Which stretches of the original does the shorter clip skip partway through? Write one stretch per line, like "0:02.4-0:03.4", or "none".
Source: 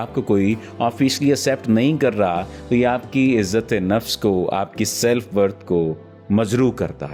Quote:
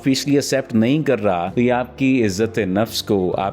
0:02.4-0:02.6